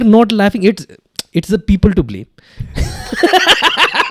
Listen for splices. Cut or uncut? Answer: uncut